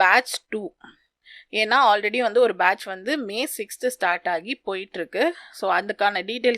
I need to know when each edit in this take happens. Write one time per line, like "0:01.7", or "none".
none